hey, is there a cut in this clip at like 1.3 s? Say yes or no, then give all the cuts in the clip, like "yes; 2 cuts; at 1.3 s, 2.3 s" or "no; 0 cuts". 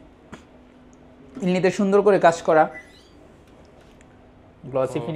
no; 0 cuts